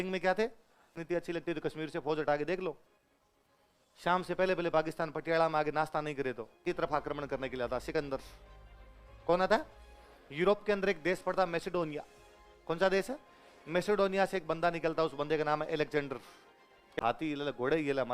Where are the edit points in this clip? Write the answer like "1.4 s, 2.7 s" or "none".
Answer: 1.0 s, 6.6 s, 17.0 s